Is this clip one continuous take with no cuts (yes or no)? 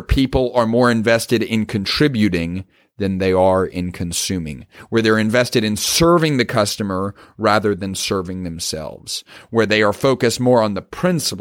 yes